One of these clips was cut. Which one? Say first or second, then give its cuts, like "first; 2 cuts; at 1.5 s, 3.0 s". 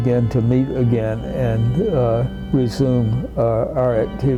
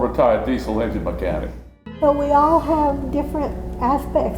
second; 1 cut; at 1.6 s